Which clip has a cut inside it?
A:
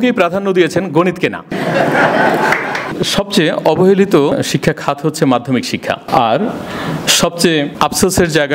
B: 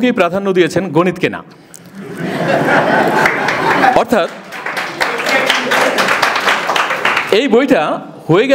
A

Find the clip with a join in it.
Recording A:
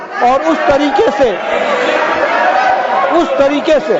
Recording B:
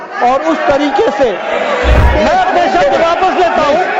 B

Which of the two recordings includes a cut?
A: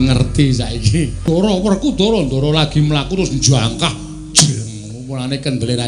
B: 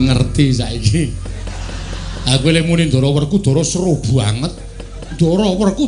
A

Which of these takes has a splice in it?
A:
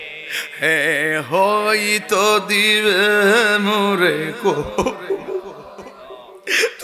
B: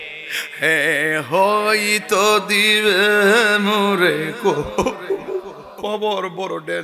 B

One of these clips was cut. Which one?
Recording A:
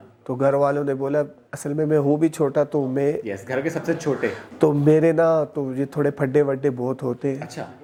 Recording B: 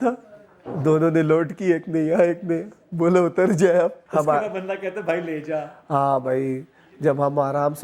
B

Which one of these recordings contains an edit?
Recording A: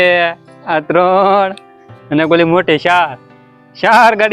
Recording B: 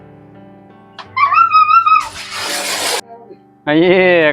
B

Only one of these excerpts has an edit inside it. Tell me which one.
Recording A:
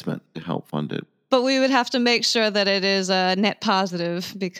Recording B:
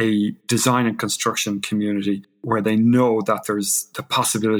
A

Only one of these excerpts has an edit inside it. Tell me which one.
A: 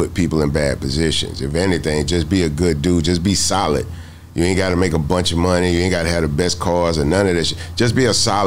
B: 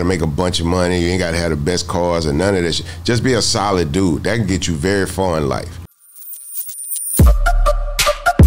B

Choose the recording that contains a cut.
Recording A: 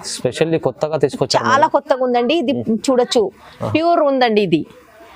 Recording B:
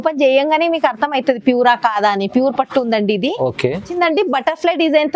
B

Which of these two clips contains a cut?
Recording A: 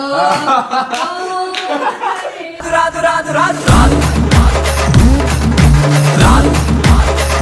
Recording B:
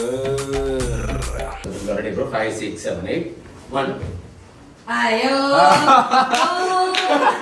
B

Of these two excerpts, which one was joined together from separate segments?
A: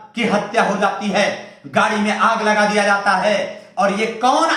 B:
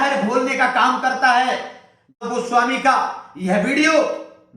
B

